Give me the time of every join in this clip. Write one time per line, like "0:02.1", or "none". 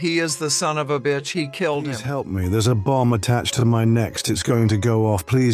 0:01.8